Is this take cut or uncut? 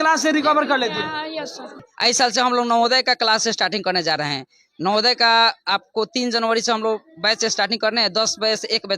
cut